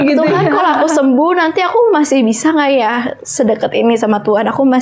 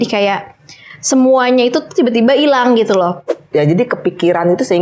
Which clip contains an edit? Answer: second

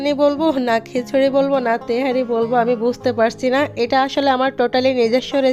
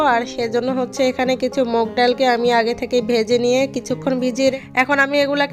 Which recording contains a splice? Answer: second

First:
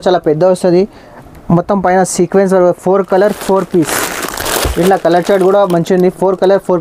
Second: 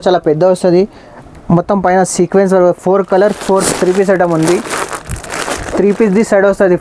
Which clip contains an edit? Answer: second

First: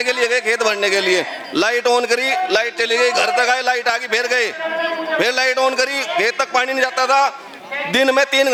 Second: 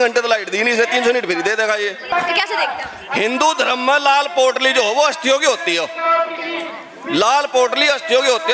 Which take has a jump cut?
second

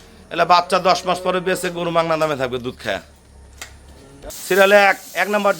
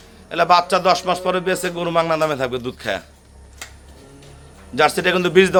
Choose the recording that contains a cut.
first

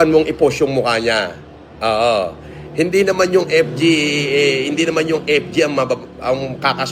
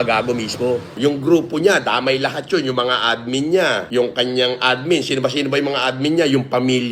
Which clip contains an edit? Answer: second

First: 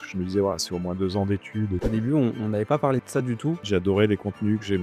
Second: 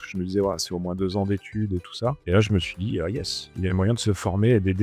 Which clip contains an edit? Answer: first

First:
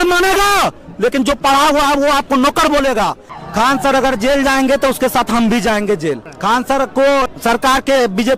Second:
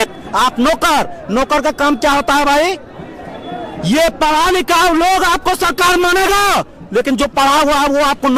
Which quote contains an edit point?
first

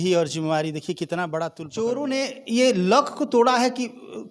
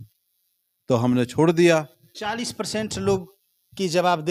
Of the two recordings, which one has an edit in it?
first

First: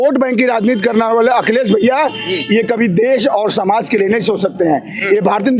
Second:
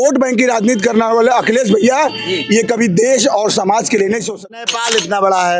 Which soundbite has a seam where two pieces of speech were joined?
second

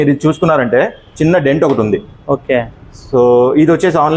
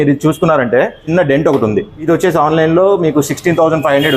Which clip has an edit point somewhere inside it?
second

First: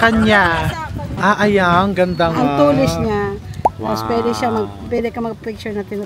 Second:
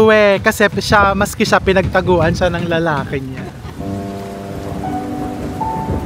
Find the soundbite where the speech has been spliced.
first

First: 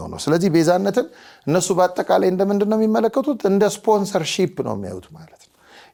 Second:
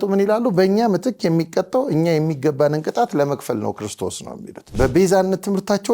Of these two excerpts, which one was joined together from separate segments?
second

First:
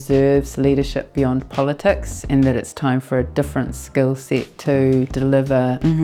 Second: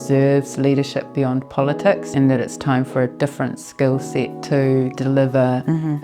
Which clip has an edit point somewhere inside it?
second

